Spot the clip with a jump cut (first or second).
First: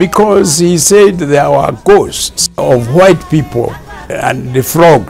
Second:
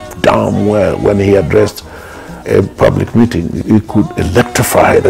first